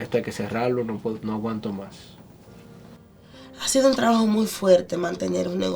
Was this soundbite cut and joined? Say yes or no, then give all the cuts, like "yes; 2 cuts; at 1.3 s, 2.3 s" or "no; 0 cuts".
yes; 1 cut; at 3.0 s